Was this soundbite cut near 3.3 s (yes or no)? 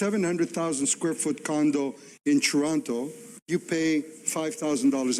yes